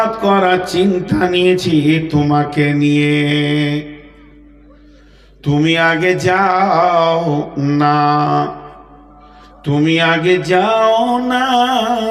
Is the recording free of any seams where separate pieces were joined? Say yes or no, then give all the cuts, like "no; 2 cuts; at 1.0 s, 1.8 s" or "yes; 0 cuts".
yes; 0 cuts